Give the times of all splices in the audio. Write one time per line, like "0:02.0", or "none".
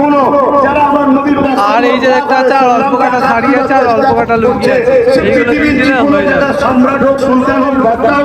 none